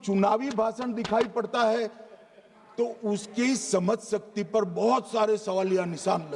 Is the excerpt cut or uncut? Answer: uncut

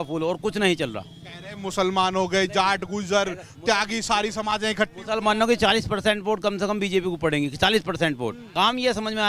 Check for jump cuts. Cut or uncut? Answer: cut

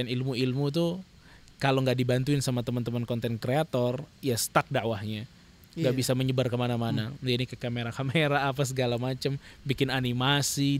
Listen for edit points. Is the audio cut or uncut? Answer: uncut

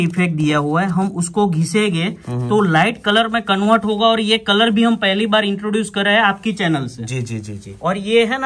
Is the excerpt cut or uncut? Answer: uncut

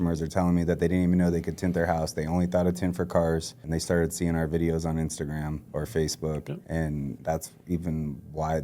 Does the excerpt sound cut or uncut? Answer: cut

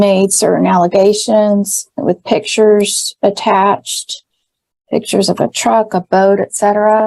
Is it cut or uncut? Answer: uncut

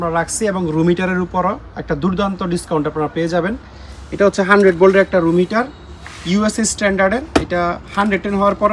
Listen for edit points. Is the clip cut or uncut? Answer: uncut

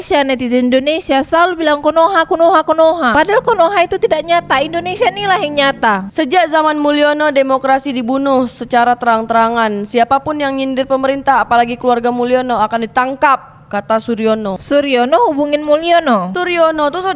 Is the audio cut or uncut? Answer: uncut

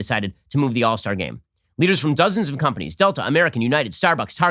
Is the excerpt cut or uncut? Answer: uncut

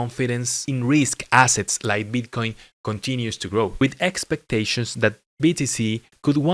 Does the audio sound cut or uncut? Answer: uncut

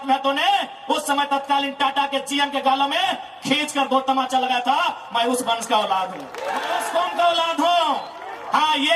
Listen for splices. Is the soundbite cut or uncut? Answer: cut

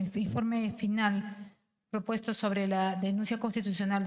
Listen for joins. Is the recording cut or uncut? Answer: uncut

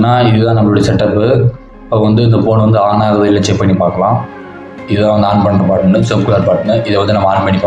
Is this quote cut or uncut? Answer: uncut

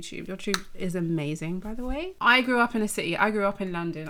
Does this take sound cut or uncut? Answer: cut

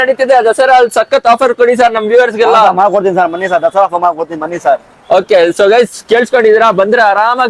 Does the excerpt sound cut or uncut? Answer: uncut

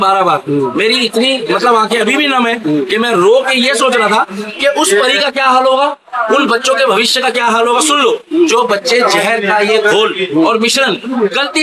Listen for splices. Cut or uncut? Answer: uncut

